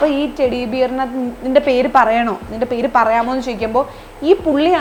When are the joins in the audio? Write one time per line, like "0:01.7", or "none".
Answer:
none